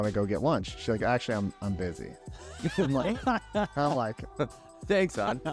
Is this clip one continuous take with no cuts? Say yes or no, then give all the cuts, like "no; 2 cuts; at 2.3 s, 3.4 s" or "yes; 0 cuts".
yes; 0 cuts